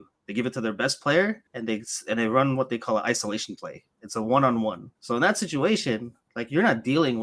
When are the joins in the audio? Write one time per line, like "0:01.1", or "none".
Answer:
0:01.5
0:04.9